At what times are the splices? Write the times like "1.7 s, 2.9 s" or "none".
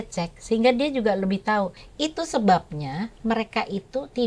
1.8 s